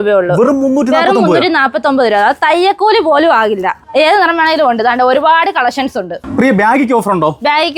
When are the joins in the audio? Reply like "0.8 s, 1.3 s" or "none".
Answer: none